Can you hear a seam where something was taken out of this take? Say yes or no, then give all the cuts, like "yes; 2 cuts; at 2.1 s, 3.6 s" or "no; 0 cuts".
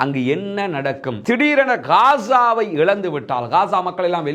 yes; 1 cut; at 1.1 s